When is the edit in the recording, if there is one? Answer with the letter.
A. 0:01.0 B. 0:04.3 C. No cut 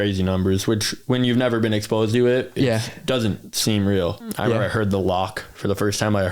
B